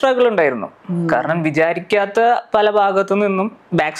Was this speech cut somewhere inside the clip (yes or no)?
no